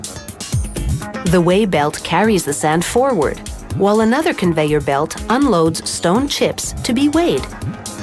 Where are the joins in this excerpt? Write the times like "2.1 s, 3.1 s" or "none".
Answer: 1.1 s